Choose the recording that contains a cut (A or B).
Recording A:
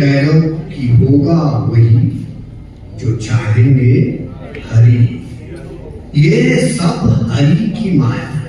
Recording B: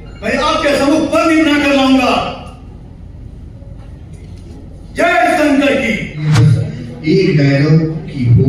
B